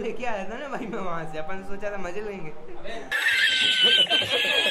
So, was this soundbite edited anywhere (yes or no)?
no